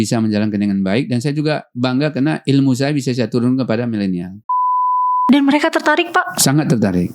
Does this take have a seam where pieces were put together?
yes; 1 cut; at 4.8 s

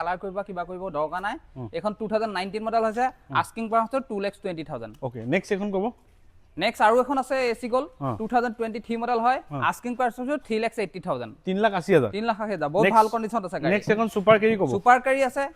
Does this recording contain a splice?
no; 0 cuts

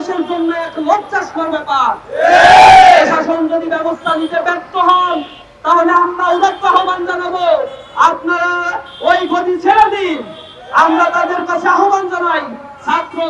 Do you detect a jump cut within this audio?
no; 0 cuts

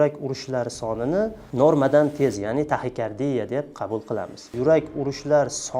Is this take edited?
yes; 2 cuts; at 1.4 s, 4.5 s

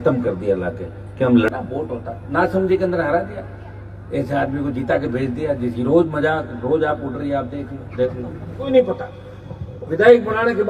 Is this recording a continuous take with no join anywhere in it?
no; 2 cuts; at 1.5 s, 8.7 s

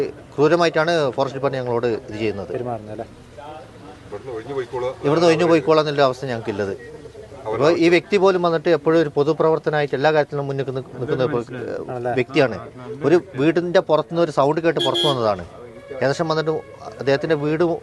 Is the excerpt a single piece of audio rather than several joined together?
yes; 0 cuts

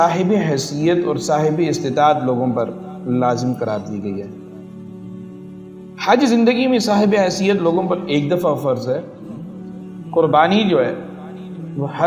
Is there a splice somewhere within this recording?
yes; 2 cuts; at 4.7 s, 6.0 s

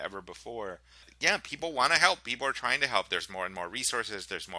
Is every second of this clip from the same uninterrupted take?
no; 1 cut; at 1.1 s

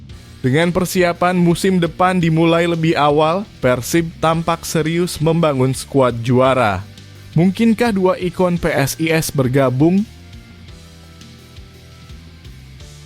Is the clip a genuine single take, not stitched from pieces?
no; 1 cut; at 10.5 s

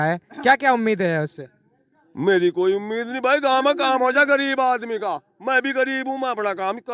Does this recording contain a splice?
no; 0 cuts

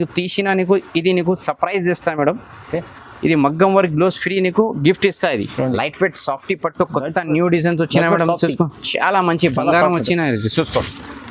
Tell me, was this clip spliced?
yes; 1 cut; at 5.7 s

